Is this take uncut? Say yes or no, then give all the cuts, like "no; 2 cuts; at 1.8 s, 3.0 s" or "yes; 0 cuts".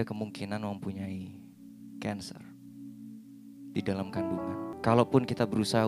no; 1 cut; at 4.7 s